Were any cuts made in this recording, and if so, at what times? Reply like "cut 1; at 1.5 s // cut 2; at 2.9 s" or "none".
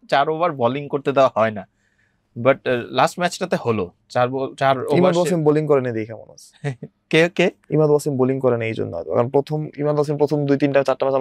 none